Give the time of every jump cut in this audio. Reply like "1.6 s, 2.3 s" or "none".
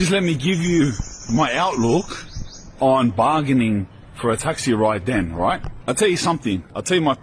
none